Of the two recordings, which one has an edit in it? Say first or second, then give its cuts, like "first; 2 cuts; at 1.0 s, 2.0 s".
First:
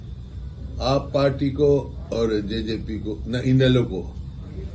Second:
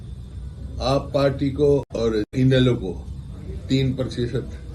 second; 1 cut; at 2.0 s